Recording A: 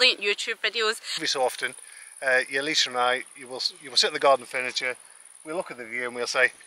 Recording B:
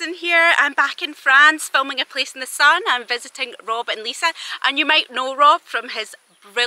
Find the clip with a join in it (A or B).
A